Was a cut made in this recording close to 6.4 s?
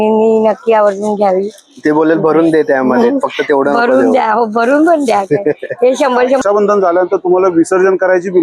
yes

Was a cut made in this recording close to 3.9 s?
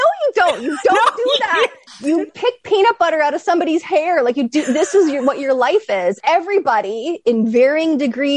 no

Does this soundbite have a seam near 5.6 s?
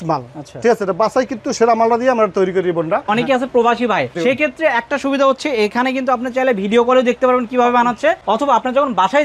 no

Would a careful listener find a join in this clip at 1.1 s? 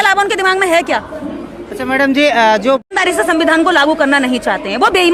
no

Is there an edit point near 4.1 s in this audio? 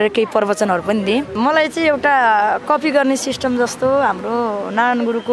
no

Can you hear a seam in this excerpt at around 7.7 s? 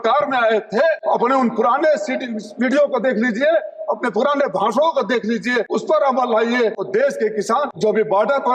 yes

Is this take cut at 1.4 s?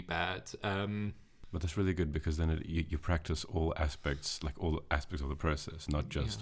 yes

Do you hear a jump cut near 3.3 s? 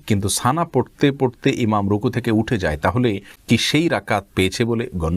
yes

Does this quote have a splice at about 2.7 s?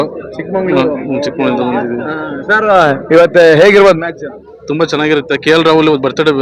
no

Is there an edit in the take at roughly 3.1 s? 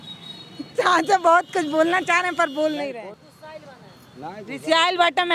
yes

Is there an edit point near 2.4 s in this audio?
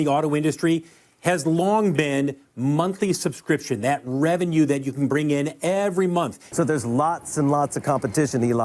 no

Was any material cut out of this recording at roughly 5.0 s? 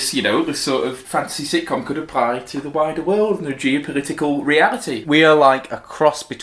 yes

